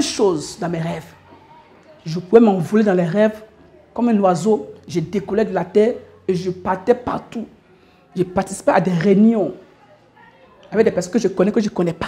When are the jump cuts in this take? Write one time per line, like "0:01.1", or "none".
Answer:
none